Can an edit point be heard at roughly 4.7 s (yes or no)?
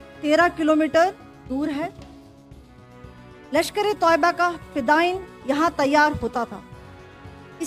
no